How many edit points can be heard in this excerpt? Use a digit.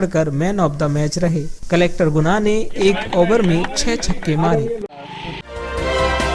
1